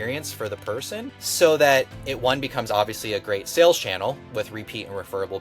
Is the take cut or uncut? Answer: cut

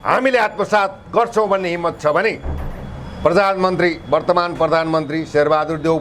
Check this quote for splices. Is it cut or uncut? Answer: uncut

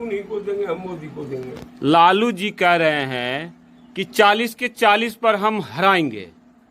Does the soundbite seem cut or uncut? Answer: uncut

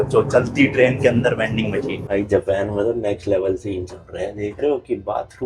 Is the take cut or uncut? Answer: cut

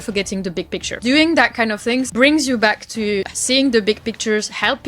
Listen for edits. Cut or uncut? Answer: cut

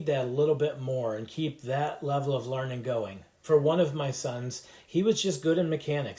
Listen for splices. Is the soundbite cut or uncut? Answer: uncut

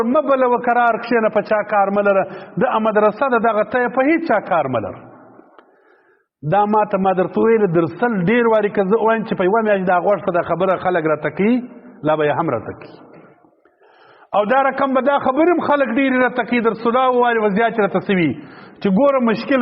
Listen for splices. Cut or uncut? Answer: uncut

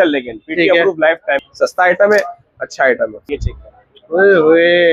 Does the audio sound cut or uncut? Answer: cut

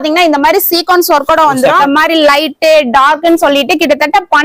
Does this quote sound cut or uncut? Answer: cut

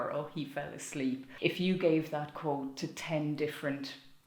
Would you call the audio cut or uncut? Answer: cut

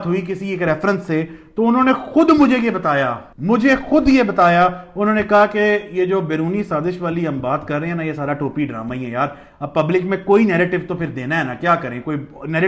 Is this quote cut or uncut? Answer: uncut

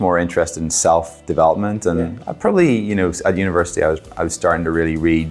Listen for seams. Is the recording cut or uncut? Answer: uncut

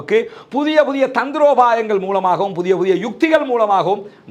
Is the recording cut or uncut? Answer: uncut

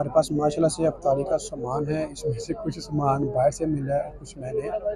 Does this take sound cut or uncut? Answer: uncut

